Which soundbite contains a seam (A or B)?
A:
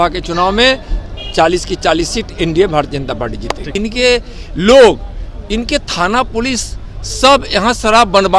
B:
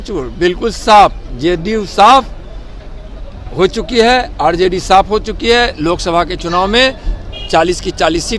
A